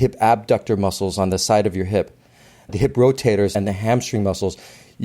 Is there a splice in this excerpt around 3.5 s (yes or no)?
yes